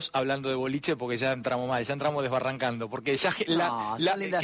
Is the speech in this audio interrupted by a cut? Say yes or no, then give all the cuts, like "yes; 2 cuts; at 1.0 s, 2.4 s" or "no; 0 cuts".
no; 0 cuts